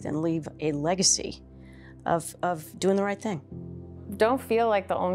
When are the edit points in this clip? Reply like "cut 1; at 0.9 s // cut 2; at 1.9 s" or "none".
cut 1; at 3.8 s